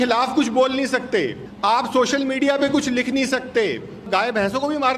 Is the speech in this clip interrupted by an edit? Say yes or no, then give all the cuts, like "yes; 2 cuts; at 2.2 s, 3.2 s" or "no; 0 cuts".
yes; 2 cuts; at 1.4 s, 4.1 s